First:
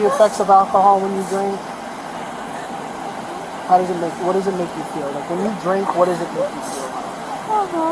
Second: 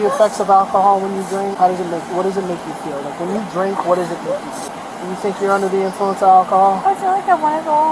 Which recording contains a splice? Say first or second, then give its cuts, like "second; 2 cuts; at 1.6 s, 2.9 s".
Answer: second; 2 cuts; at 1.5 s, 4.7 s